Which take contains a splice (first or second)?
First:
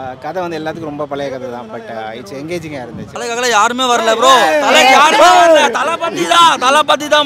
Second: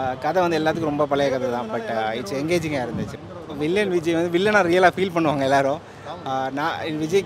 first